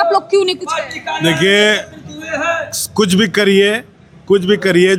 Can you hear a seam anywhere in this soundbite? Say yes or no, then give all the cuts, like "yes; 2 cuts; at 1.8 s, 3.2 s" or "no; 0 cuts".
no; 0 cuts